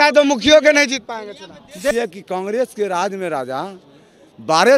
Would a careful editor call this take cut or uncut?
cut